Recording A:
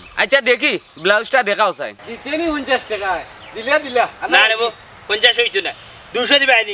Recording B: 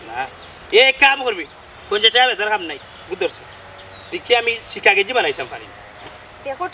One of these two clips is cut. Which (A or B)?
A